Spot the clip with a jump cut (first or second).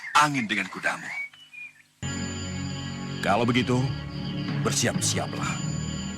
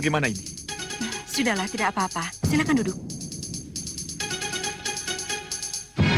first